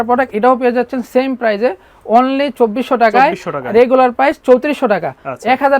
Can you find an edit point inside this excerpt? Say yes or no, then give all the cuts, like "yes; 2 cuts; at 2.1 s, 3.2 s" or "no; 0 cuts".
no; 0 cuts